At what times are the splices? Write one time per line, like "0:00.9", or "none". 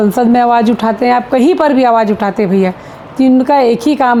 none